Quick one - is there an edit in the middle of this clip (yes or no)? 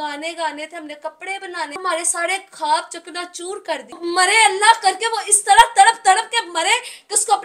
yes